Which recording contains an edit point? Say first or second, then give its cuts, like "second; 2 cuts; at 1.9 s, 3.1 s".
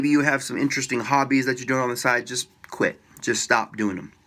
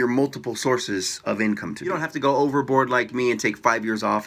second; 1 cut; at 2.0 s